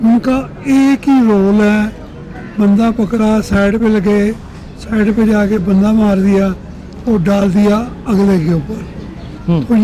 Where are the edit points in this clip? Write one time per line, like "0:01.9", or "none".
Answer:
none